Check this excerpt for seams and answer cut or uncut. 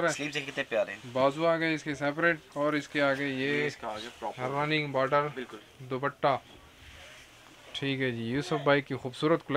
uncut